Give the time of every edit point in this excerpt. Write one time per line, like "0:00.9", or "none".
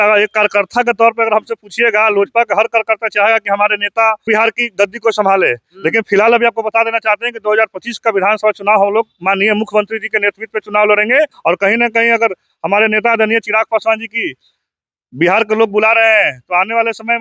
0:04.3
0:11.4